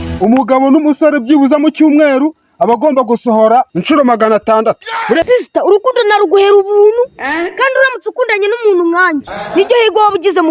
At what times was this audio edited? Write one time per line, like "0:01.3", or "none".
0:05.2